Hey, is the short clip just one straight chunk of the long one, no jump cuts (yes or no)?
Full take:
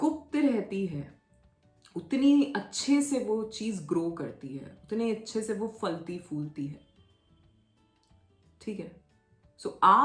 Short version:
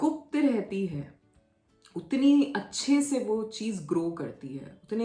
yes